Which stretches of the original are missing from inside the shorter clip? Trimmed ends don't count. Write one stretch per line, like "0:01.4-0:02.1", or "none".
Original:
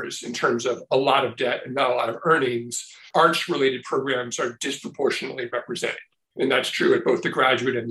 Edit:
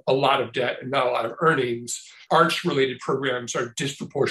none